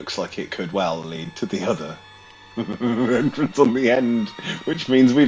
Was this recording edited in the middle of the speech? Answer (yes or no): no